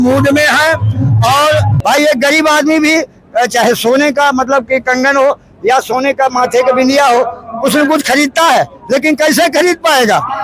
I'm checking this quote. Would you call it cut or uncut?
cut